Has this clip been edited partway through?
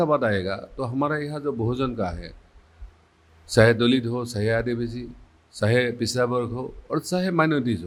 no; 0 cuts

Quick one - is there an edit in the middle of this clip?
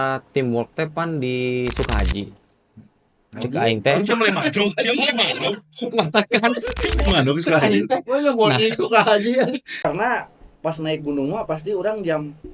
yes; 1 cut; at 9.8 s

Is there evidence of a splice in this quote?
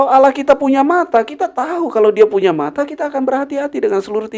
no; 0 cuts

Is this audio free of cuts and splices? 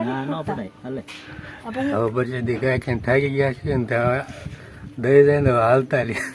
no; 1 cut; at 1.9 s

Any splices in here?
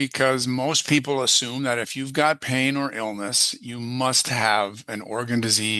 no; 0 cuts

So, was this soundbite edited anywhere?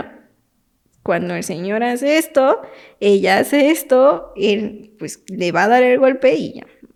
no; 0 cuts

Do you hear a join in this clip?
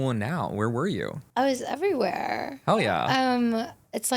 yes; 1 cut; at 1.2 s

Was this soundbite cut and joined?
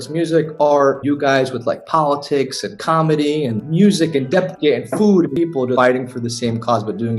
yes; 3 cuts; at 1.0 s, 3.6 s, 5.4 s

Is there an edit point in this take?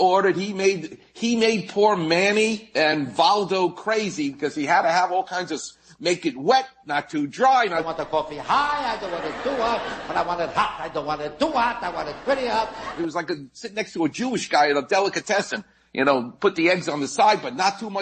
no; 0 cuts

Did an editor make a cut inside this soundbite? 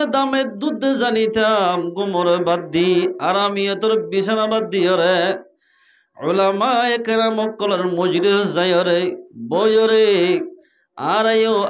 no; 0 cuts

